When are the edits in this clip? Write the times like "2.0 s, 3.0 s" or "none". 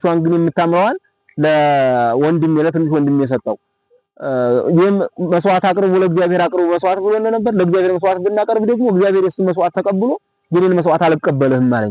none